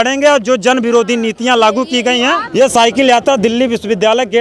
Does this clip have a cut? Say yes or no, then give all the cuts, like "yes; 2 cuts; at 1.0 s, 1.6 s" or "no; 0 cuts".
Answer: yes; 1 cut; at 2.5 s